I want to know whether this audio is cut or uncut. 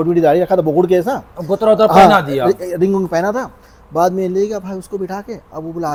uncut